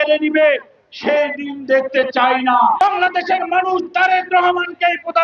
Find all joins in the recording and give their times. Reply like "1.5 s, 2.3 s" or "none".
2.8 s